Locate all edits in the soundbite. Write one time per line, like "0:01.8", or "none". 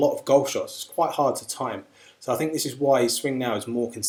none